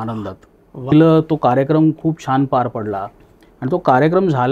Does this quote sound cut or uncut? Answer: cut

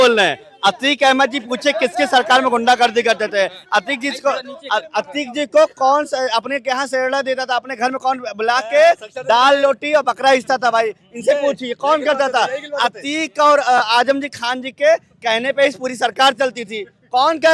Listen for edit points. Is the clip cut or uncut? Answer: uncut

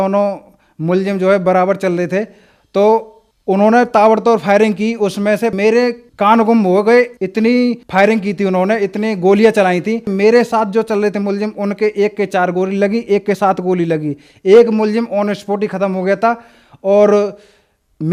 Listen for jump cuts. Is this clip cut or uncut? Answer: uncut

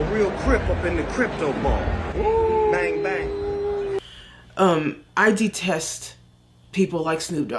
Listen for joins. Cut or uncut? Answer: cut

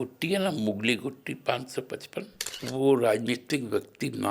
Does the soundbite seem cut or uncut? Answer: cut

